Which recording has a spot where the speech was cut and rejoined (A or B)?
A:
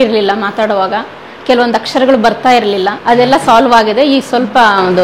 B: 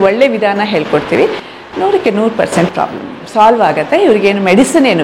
A